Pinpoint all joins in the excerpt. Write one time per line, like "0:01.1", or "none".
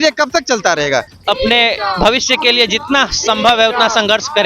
0:01.1